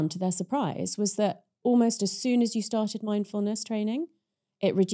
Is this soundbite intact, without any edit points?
yes; 0 cuts

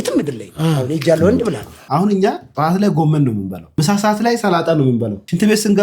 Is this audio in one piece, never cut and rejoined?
no; 2 cuts; at 1.9 s, 3.6 s

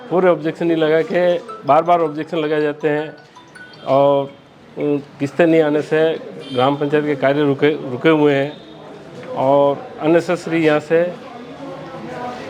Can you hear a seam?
no; 0 cuts

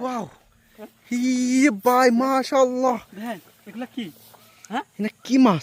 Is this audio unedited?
yes; 0 cuts

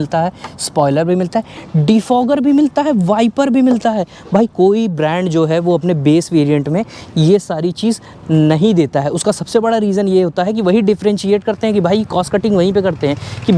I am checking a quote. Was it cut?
no; 0 cuts

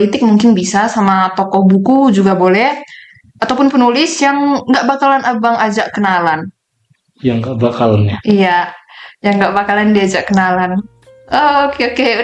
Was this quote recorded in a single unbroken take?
yes; 0 cuts

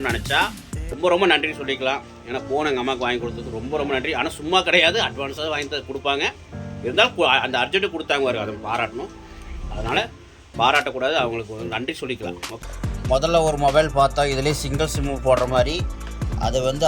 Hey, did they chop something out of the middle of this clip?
yes; 2 cuts; at 0.9 s, 12.5 s

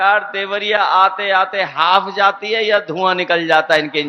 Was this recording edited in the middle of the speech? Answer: no; 0 cuts

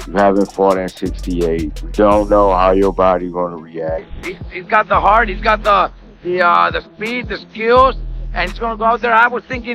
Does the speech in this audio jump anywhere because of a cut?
yes; 1 cut; at 4.0 s

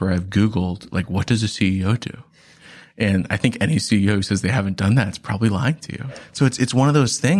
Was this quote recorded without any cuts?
no; 1 cut; at 6.2 s

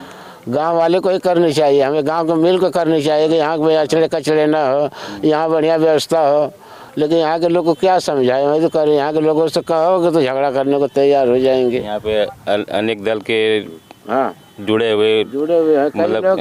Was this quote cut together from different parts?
no; 0 cuts

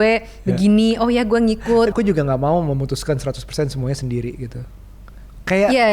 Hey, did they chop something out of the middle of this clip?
yes; 1 cut; at 1.9 s

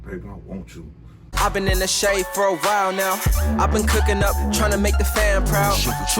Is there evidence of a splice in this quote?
yes; 1 cut; at 1.3 s

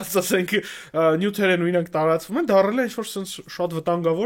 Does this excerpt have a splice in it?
no; 0 cuts

